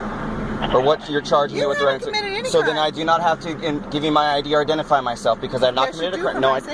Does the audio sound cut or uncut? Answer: uncut